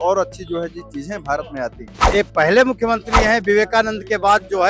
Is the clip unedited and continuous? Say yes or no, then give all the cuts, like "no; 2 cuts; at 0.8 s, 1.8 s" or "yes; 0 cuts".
no; 1 cut; at 2.1 s